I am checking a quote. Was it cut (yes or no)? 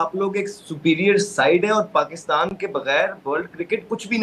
no